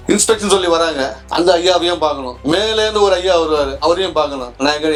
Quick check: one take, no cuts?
yes; 0 cuts

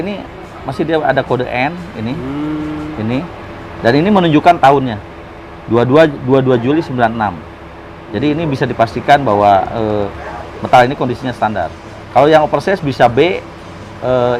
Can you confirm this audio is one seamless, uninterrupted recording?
yes; 0 cuts

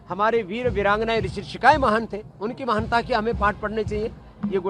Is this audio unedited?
yes; 0 cuts

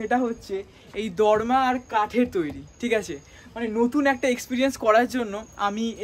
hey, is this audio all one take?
yes; 0 cuts

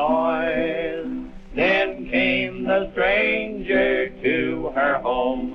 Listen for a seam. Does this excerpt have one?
yes; 1 cut; at 1.4 s

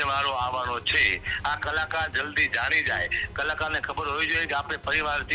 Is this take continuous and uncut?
yes; 0 cuts

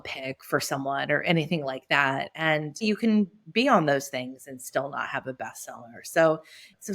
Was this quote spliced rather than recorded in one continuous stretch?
yes; 1 cut; at 2.8 s

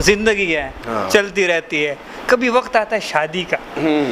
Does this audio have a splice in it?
no; 0 cuts

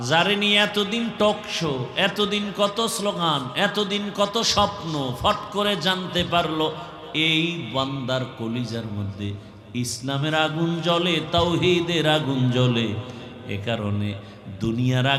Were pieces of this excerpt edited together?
no; 0 cuts

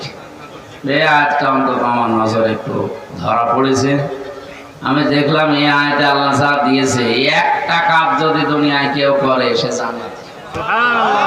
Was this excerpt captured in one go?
yes; 0 cuts

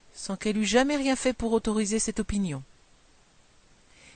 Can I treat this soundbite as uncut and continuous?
no; 1 cut; at 1.3 s

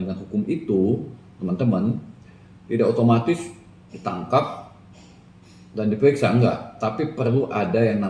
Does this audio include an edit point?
no; 0 cuts

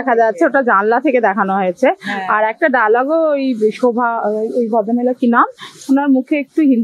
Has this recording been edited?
no; 0 cuts

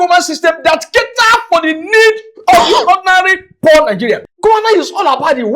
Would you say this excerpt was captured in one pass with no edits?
no; 1 cut; at 4.2 s

